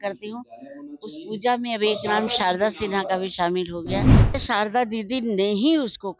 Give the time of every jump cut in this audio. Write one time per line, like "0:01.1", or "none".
0:04.4

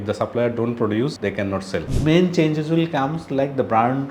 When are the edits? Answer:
0:01.9

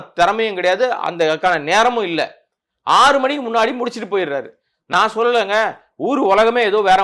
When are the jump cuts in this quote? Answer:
none

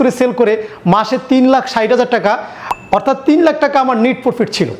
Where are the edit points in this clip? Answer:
none

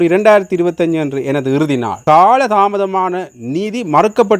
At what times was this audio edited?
0:01.9

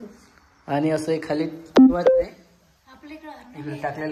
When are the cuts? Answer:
none

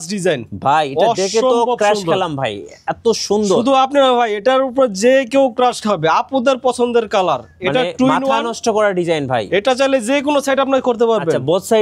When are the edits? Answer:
none

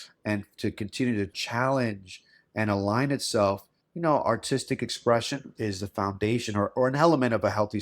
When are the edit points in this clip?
0:05.5

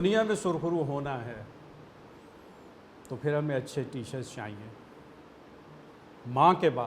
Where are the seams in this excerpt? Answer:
0:05.9

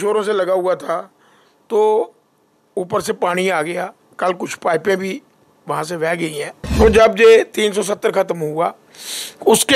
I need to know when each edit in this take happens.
0:06.7

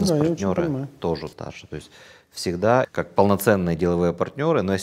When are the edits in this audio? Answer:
0:01.3
0:02.9

